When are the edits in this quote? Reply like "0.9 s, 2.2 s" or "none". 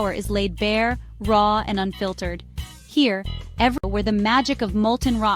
3.8 s